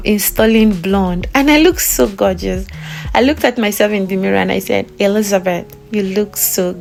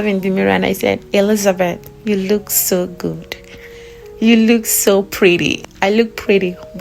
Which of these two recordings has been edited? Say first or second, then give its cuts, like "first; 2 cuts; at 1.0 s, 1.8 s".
second; 1 cut; at 5.5 s